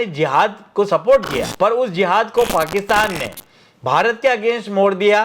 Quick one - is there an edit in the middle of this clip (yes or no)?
yes